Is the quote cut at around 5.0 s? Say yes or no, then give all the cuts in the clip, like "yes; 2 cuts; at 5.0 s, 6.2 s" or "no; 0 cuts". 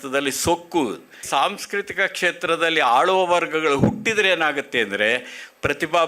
no; 1 cut; at 1.2 s